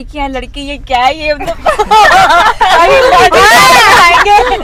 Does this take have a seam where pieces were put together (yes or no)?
no